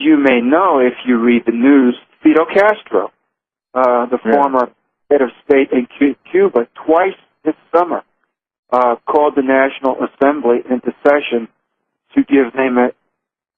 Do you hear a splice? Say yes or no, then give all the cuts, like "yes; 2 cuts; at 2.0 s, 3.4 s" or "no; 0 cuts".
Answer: no; 0 cuts